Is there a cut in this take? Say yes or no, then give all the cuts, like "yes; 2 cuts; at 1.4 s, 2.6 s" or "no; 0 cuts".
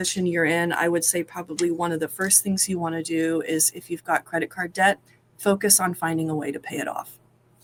no; 0 cuts